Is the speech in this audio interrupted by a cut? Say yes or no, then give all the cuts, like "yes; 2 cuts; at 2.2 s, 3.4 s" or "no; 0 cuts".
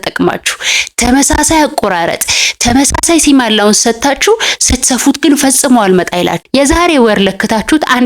yes; 1 cut; at 6.4 s